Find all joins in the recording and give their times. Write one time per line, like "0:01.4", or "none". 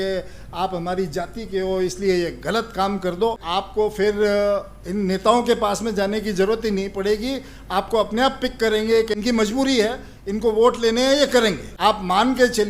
0:03.4
0:09.1
0:11.7